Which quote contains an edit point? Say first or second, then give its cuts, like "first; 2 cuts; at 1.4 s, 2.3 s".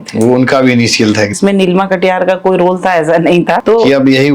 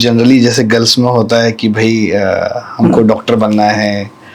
first; 2 cuts; at 1.3 s, 3.6 s